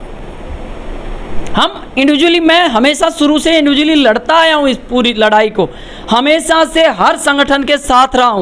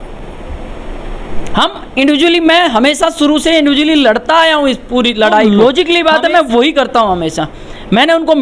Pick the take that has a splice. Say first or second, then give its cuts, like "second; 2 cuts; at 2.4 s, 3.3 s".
second; 1 cut; at 5.5 s